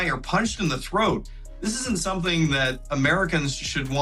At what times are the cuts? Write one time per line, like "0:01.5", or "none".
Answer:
0:02.9